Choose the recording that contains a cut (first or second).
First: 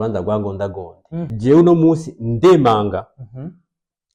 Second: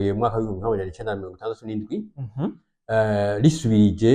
first